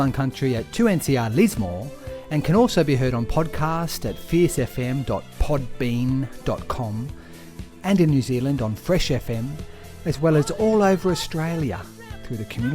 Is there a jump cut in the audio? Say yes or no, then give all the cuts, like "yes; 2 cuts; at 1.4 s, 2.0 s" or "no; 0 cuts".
no; 0 cuts